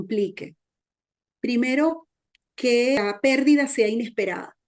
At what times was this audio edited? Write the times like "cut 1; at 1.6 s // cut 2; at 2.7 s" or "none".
cut 1; at 3.0 s